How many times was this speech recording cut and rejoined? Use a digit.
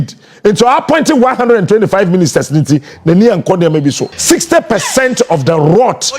1